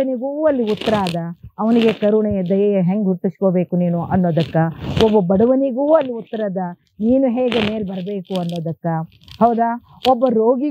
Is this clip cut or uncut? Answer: uncut